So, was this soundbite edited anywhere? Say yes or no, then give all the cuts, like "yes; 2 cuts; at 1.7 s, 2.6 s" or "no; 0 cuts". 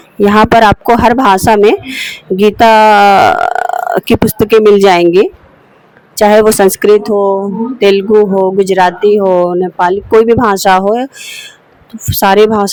no; 0 cuts